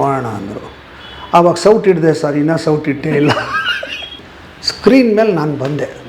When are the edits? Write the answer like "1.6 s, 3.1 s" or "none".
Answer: 4.2 s